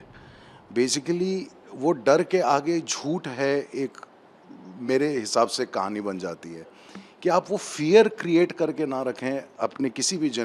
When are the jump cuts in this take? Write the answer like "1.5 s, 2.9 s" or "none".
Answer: none